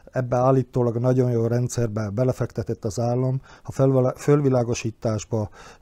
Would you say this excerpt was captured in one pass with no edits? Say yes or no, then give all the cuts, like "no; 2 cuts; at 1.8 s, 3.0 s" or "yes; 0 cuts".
yes; 0 cuts